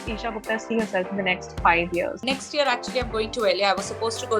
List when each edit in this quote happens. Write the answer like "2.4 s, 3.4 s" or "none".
2.2 s